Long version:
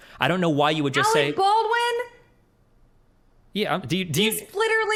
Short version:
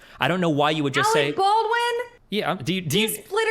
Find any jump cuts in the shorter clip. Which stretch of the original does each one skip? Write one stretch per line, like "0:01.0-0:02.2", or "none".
0:02.2-0:03.4